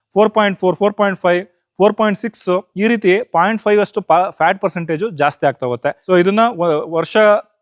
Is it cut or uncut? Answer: cut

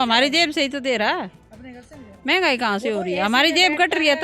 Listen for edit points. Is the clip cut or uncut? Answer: uncut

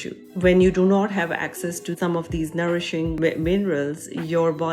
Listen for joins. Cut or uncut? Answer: uncut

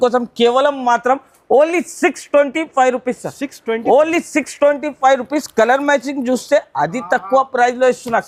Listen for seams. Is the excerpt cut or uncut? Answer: uncut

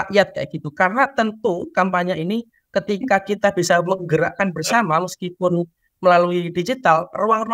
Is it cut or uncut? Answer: uncut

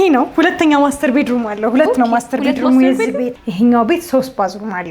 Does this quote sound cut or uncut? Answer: cut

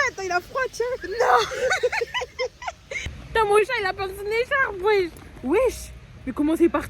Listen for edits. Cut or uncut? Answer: uncut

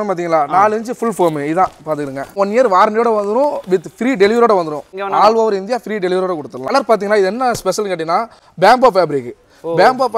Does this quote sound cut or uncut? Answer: cut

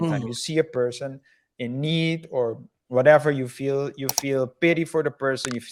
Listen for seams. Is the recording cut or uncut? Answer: uncut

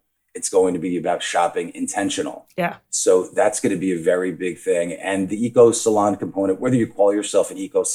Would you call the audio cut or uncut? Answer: uncut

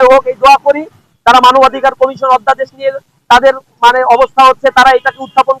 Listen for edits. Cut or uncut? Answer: cut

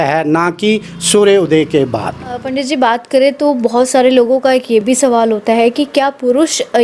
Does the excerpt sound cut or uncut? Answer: cut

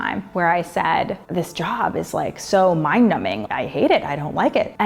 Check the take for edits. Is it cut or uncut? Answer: uncut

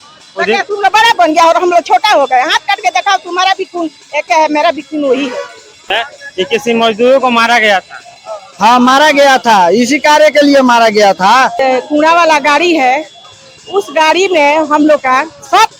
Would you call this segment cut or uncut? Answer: cut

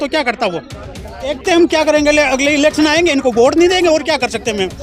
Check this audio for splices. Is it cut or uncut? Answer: cut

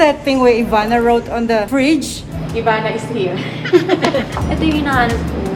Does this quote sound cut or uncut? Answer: uncut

